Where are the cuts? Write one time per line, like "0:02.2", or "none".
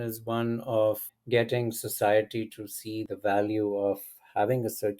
0:01.0
0:03.1